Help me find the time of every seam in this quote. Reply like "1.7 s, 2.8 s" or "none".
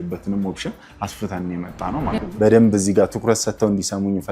2.2 s